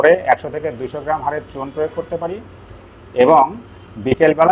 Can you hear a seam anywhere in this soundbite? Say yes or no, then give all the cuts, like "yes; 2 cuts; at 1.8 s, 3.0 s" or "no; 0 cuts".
no; 0 cuts